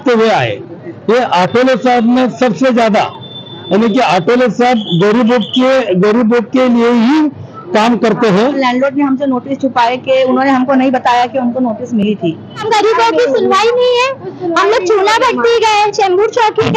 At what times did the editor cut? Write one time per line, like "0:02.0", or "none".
0:08.6
0:12.6